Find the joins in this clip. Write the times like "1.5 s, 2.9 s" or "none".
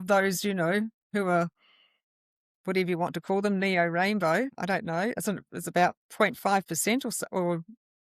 1.0 s, 4.6 s